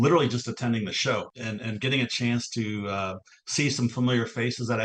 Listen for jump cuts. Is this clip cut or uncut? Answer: cut